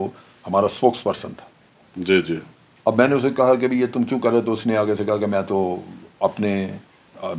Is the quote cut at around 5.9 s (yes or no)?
no